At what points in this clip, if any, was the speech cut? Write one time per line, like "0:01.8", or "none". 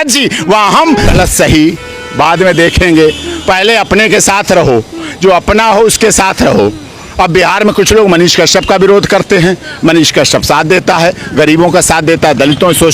0:01.1